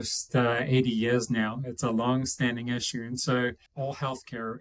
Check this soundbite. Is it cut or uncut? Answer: cut